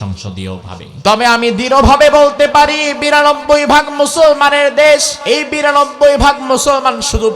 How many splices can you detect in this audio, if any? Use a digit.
2